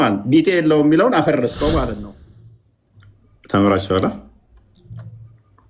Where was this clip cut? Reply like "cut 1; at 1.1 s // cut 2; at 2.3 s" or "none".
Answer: cut 1; at 1.9 s